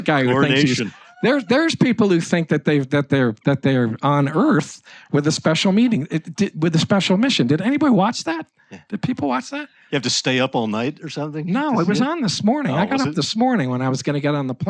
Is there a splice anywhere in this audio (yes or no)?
no